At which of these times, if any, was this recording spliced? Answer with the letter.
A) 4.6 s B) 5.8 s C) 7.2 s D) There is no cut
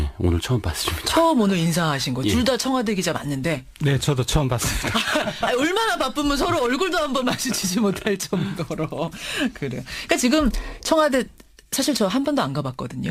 B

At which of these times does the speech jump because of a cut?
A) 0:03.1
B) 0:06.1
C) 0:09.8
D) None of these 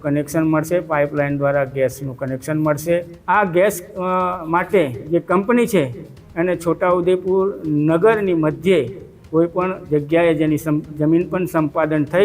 A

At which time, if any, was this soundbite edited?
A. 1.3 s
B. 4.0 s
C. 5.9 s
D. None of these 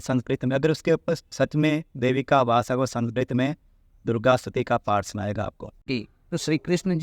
C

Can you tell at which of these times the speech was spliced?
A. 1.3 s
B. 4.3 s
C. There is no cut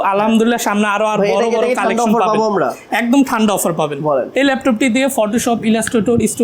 B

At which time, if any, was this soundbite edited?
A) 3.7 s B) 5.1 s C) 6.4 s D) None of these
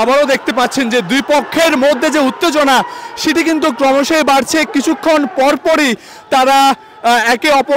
D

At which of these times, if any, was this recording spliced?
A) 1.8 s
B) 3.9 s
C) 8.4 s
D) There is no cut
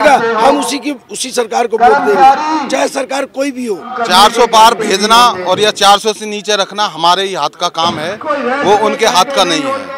B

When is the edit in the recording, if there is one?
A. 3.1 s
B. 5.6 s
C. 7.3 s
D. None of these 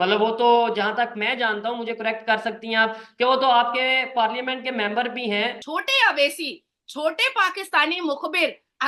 B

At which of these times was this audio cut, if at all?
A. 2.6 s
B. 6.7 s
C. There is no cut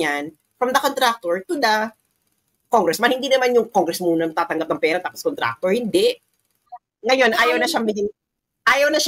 B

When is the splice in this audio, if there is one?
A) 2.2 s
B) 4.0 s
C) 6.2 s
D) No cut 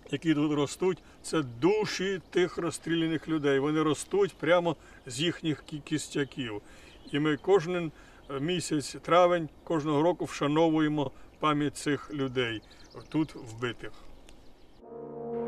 B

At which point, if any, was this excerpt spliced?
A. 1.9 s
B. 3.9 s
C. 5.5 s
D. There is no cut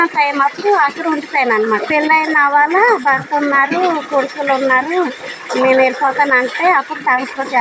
A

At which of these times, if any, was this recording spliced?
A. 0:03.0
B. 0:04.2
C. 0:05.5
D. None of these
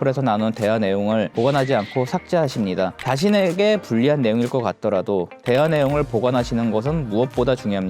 A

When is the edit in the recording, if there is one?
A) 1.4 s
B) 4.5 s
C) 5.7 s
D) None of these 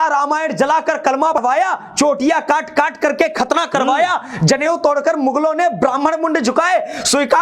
A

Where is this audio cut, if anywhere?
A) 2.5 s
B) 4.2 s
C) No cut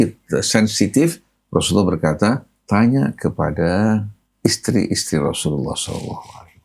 B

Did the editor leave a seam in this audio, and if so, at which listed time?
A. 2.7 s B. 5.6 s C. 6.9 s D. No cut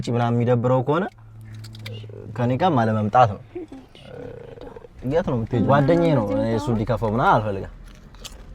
B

